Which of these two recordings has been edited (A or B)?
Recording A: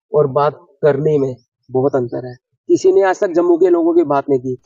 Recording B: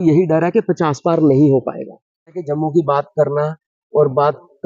B